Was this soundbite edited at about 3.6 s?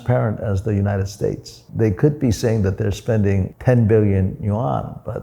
no; 1 cut; at 1.6 s

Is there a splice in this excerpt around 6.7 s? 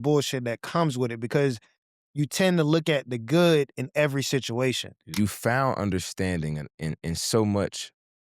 no; 1 cut; at 4.9 s

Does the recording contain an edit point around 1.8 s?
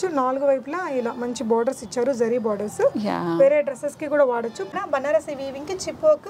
no; 1 cut; at 4.8 s

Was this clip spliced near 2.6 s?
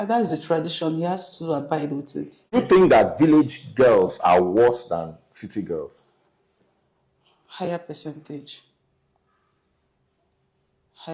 yes; 1 cut; at 2.6 s

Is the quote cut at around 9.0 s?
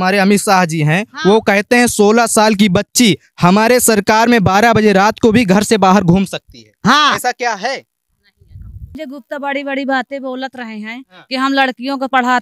yes; 1 cut; at 9.0 s

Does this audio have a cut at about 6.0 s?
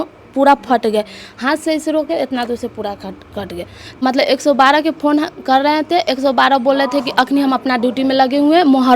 no; 1 cut; at 4.0 s

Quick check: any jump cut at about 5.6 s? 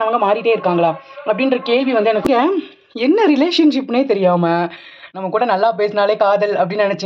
no; 1 cut; at 2.2 s

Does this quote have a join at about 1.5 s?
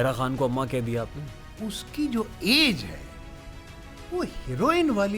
yes; 1 cut; at 1.5 s

